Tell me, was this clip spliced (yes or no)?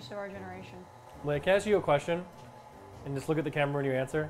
yes